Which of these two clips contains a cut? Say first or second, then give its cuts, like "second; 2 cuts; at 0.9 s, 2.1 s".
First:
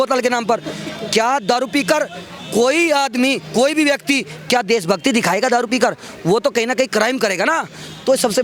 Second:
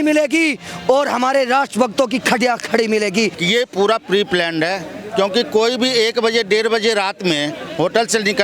second; 1 cut; at 3.4 s